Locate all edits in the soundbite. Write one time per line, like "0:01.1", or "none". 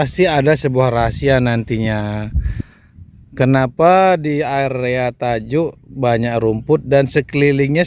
none